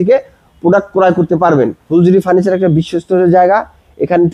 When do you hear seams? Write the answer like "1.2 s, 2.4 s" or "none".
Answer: 1.8 s